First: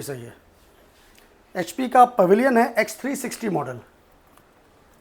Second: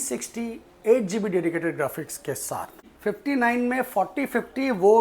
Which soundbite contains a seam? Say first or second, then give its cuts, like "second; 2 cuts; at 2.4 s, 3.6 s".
second; 1 cut; at 2.8 s